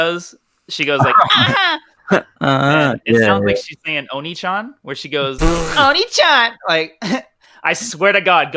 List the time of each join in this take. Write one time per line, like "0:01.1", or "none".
none

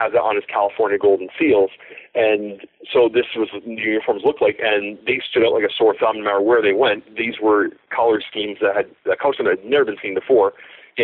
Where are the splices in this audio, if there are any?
none

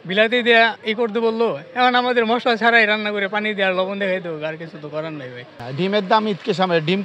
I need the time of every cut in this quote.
0:05.6

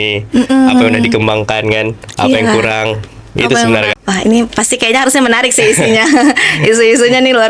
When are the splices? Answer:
0:03.9

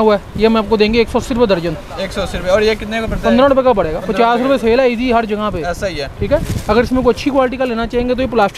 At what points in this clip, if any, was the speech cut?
none

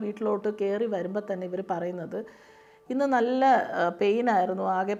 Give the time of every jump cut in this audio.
none

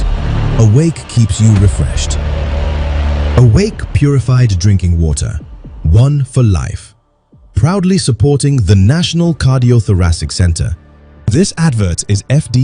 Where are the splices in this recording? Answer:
none

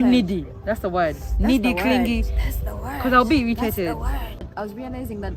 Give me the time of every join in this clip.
0:04.5

